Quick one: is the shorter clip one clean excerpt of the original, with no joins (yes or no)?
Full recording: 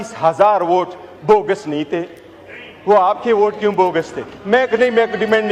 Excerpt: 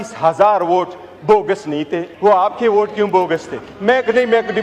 no